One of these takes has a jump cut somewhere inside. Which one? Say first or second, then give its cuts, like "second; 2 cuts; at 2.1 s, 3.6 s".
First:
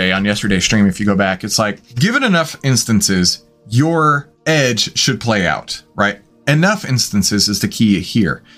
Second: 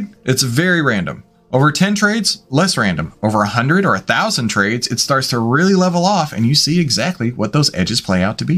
first; 2 cuts; at 1.9 s, 4.3 s